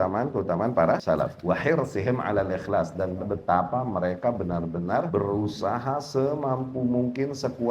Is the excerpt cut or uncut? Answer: cut